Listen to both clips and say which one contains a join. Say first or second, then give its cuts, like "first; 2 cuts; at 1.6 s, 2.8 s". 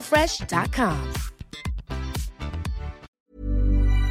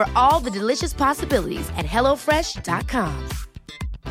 first; 1 cut; at 3.1 s